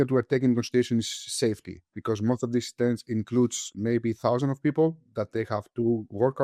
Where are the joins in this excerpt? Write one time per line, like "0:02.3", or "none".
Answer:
none